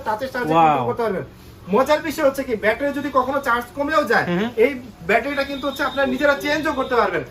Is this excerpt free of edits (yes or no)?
yes